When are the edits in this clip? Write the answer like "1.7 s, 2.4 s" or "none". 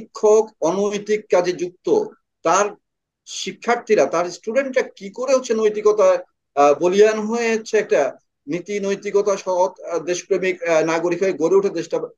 none